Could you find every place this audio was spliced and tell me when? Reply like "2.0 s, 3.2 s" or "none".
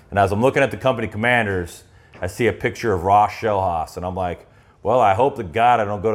none